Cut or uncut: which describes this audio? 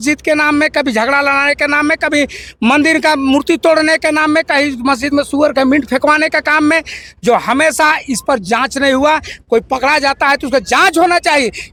uncut